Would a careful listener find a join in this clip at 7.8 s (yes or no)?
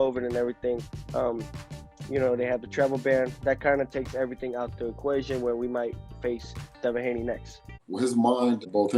yes